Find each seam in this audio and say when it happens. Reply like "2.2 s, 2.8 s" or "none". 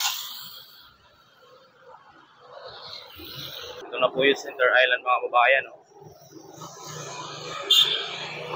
3.8 s